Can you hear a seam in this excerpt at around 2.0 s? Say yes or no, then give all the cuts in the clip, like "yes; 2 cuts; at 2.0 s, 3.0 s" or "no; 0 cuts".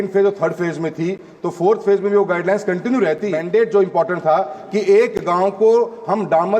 no; 1 cut; at 3.3 s